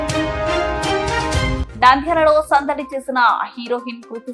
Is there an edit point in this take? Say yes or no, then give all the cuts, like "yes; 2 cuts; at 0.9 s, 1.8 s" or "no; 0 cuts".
no; 0 cuts